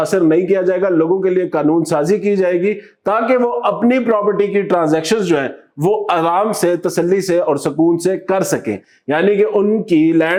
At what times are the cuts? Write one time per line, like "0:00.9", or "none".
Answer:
none